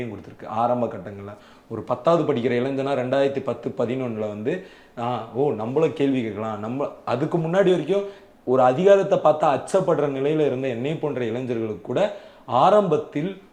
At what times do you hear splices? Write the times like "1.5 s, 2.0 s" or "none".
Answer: none